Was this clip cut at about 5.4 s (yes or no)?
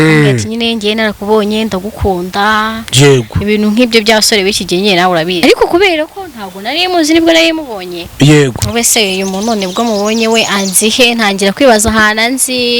yes